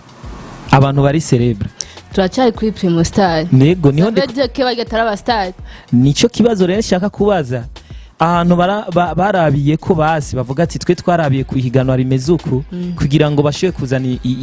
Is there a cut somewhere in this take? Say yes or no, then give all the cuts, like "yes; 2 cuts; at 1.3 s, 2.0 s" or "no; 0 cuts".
no; 0 cuts